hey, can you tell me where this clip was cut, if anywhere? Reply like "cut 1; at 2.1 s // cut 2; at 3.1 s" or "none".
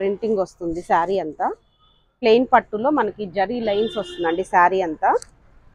cut 1; at 2.1 s